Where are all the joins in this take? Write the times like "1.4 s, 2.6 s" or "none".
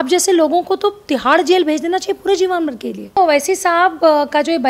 3.2 s